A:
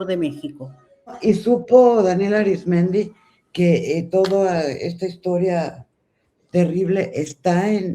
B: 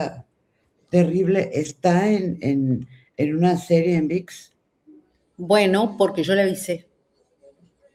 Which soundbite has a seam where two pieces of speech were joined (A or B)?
A